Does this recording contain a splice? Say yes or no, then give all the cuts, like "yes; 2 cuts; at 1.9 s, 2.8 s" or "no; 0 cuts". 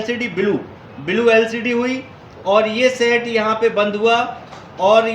no; 0 cuts